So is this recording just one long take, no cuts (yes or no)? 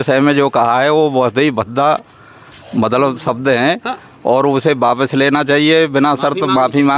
yes